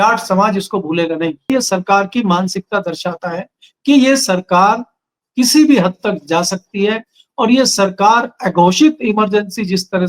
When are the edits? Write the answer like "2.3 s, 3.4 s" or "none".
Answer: 1.5 s